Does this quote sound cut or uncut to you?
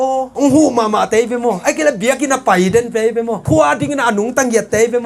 cut